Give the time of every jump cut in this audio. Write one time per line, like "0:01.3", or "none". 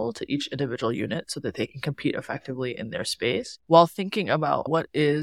none